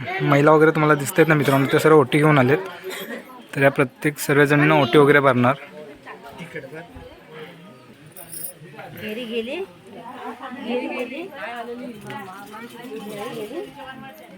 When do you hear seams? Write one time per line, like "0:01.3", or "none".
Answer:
0:07.9

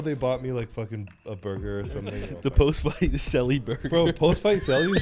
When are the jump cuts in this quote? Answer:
0:02.2

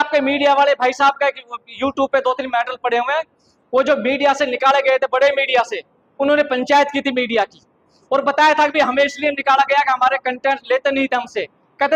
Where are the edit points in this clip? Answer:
none

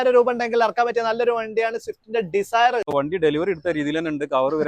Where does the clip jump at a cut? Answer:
0:02.9

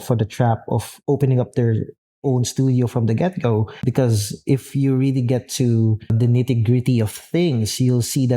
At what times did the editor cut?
0:03.8
0:06.1

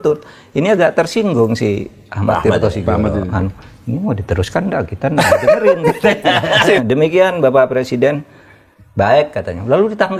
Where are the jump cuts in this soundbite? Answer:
0:06.8

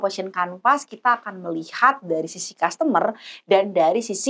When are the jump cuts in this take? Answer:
none

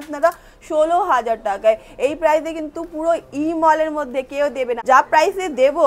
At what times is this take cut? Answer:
0:04.7

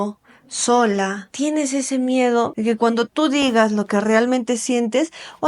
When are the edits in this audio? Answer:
0:01.2
0:02.5

